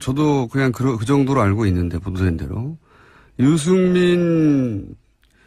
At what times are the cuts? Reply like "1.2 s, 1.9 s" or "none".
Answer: 3.6 s